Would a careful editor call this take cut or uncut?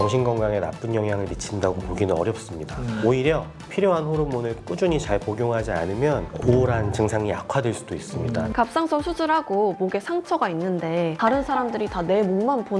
cut